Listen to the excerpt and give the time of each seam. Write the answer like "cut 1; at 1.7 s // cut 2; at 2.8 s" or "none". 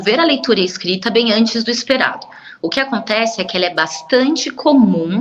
none